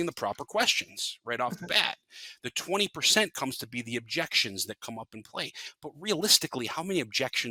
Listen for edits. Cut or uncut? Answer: uncut